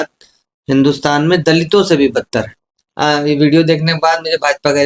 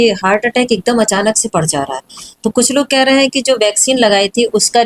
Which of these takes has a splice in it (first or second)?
first